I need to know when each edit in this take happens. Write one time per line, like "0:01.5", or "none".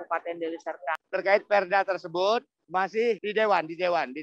0:01.0